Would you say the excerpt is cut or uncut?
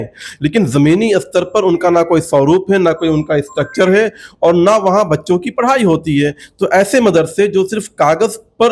uncut